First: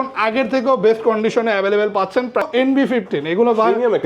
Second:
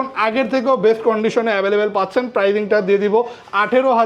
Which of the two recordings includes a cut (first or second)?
first